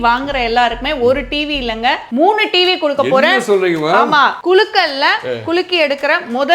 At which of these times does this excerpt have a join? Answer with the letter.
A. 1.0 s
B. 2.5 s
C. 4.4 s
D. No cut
C